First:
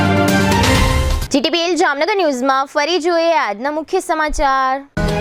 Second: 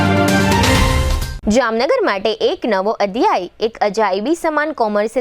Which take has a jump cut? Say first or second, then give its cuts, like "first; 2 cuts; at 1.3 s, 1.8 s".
second; 1 cut; at 1.2 s